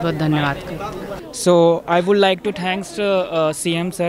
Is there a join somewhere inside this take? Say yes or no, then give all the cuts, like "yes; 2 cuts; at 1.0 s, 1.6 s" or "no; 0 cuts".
yes; 1 cut; at 1.0 s